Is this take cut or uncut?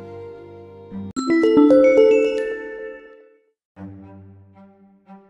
uncut